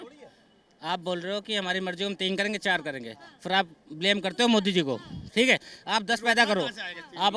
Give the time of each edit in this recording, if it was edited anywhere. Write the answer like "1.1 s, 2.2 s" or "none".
none